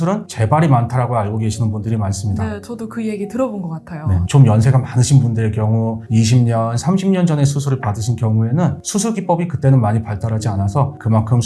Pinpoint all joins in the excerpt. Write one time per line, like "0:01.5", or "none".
0:04.2